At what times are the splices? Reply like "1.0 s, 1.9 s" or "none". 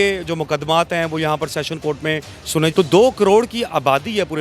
2.7 s

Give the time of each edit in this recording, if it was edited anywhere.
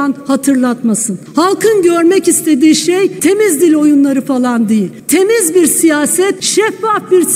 1.2 s, 3.2 s, 5.0 s, 6.4 s

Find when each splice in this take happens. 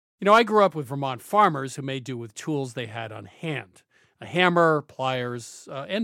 none

